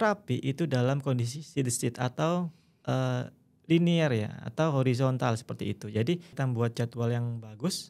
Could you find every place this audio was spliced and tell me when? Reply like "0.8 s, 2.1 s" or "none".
6.3 s